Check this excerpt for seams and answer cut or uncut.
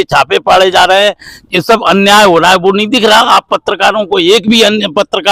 uncut